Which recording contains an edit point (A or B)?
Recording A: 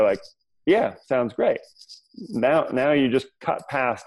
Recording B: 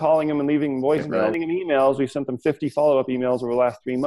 B